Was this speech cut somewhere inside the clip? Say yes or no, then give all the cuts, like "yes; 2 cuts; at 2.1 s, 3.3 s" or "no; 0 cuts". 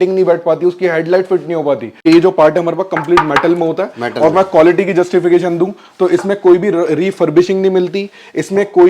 yes; 1 cut; at 1.9 s